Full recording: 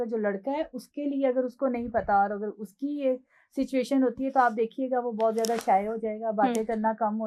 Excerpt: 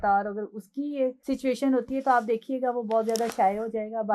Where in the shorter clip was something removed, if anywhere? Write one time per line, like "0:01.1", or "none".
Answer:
0:01.2